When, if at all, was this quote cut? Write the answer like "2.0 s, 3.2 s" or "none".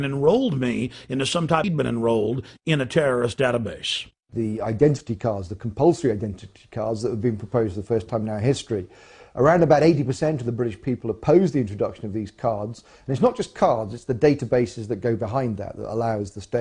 none